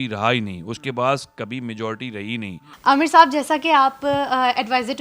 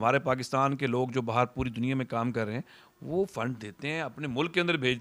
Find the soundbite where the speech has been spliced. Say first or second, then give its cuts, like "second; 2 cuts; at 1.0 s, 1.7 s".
first; 1 cut; at 2.6 s